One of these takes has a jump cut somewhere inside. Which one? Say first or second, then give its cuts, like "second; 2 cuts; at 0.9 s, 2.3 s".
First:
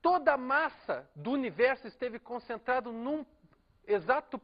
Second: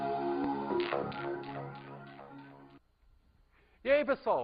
first; 1 cut; at 3.1 s